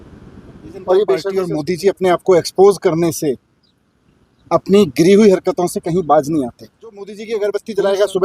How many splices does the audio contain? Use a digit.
2